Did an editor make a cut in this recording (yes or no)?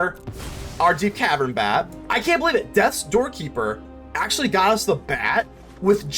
yes